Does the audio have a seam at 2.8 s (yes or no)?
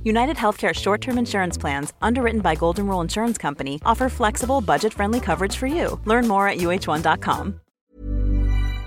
no